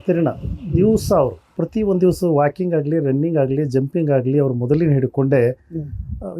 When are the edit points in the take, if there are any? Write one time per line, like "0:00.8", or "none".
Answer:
0:01.4

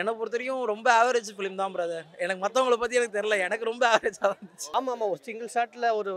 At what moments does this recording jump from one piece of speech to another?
none

